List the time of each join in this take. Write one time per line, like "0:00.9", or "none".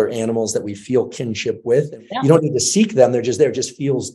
0:02.0